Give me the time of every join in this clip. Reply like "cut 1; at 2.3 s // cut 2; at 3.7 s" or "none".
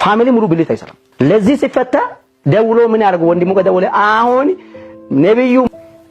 cut 1; at 1.0 s